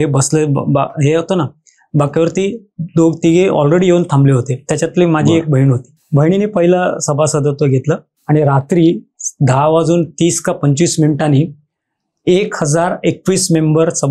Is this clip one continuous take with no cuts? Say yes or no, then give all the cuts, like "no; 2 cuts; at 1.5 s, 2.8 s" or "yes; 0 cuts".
no; 2 cuts; at 6.0 s, 8.1 s